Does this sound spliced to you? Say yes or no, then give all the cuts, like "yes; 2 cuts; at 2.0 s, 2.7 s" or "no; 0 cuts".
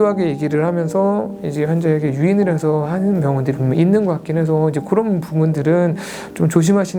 no; 0 cuts